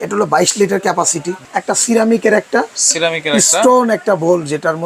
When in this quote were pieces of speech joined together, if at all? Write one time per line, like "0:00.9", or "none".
0:01.3